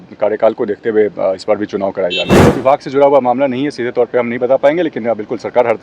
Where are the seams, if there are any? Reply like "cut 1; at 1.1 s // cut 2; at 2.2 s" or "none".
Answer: cut 1; at 2.4 s